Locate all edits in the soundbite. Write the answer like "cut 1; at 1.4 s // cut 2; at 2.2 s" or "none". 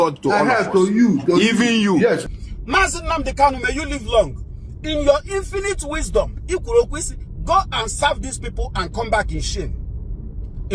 cut 1; at 2.2 s